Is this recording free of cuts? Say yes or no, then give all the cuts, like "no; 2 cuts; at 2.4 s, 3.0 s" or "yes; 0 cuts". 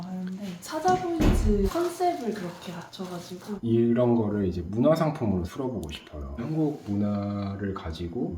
no; 2 cuts; at 3.5 s, 6.4 s